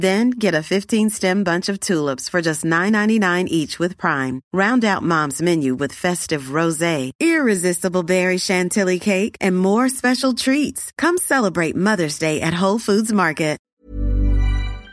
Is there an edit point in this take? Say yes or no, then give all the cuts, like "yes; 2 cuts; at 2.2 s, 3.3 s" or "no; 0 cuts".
yes; 1 cut; at 13.6 s